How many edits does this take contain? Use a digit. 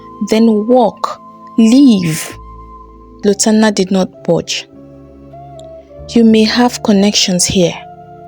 1